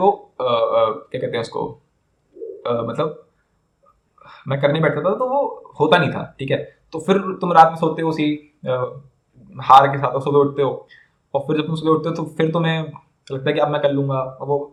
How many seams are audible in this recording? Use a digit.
0